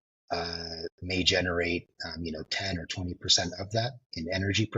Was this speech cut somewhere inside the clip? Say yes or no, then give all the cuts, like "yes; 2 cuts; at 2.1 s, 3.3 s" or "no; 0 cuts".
no; 0 cuts